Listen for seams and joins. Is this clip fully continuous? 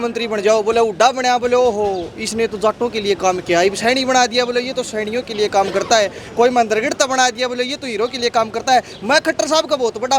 yes; 0 cuts

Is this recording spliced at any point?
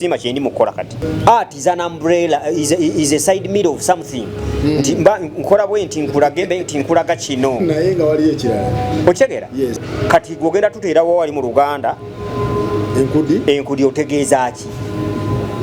yes; 2 cuts; at 1.0 s, 9.8 s

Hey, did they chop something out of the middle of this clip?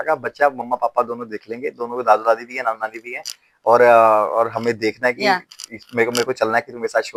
no; 0 cuts

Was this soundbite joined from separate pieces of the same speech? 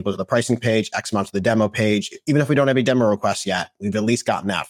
no; 0 cuts

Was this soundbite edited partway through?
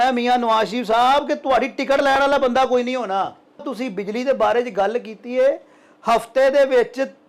yes; 1 cut; at 3.7 s

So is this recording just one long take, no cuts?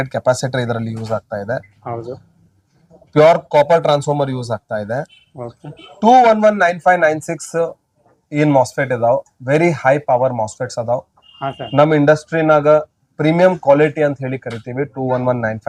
yes; 0 cuts

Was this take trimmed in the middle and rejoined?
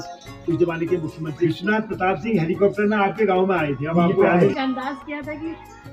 yes; 2 cuts; at 1.5 s, 4.5 s

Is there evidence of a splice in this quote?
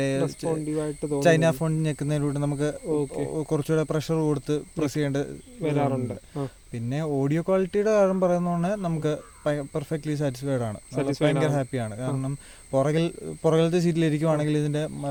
no; 0 cuts

